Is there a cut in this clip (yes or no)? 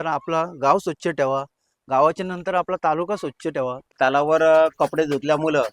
yes